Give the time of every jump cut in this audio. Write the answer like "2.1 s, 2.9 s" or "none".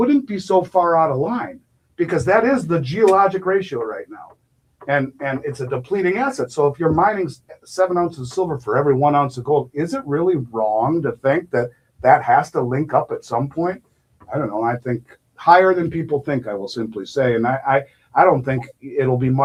none